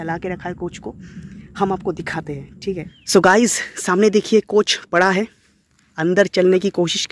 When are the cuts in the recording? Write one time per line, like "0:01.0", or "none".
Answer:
0:02.9